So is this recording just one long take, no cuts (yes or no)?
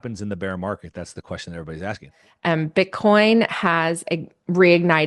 no